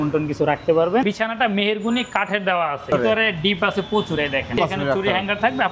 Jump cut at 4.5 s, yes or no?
yes